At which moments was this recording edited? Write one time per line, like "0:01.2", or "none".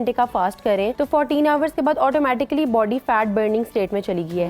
0:00.9